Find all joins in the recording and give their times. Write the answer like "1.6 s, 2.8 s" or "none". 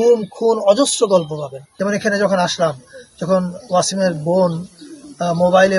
1.7 s